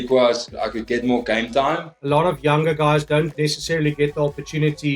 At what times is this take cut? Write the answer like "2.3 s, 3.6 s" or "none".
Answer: 1.9 s